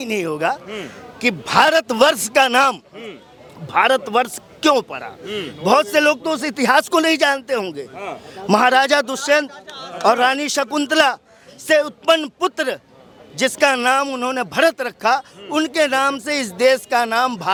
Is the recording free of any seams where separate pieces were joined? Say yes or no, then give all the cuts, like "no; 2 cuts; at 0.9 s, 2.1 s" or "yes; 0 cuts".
yes; 0 cuts